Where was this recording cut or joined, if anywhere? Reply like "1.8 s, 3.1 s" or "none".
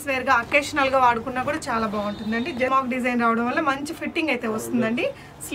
2.7 s